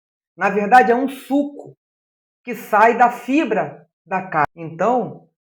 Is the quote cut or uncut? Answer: uncut